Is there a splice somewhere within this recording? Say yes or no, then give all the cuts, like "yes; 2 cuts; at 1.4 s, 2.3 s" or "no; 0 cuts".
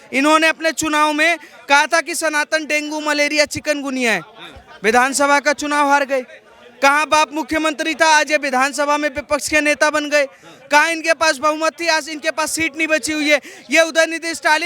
no; 0 cuts